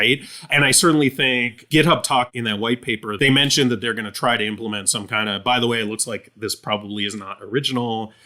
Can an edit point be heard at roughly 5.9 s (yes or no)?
no